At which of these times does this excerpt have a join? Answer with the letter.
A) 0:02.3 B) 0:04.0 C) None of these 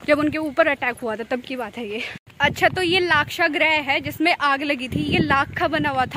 A